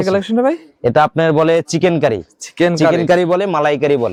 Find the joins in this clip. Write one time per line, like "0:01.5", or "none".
none